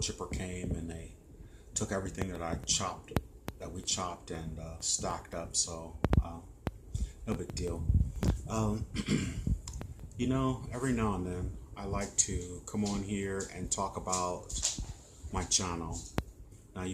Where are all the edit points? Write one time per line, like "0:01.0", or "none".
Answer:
0:12.9